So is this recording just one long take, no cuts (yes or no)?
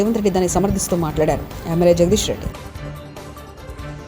yes